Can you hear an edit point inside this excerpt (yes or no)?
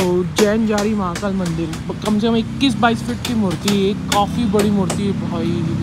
no